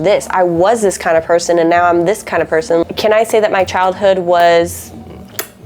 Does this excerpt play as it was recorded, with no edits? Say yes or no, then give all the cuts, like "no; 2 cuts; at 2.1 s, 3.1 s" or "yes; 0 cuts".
no; 1 cut; at 2.8 s